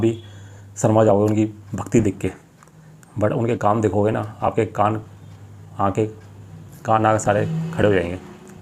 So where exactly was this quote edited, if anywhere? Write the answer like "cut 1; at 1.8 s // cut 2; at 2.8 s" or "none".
none